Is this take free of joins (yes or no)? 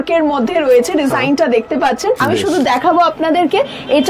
no